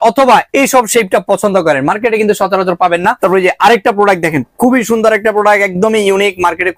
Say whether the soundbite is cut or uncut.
cut